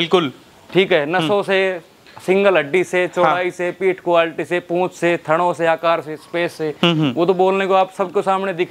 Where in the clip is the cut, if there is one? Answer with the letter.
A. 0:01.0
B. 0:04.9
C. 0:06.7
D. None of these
C